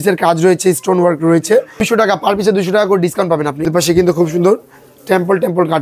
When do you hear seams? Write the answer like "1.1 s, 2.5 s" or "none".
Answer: 1.8 s, 3.6 s